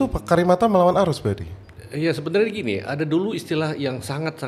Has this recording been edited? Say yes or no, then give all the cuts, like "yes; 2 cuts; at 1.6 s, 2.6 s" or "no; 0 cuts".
no; 0 cuts